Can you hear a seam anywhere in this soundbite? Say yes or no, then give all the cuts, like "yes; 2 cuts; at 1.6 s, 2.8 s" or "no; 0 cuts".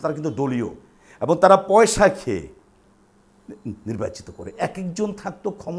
yes; 1 cut; at 4.5 s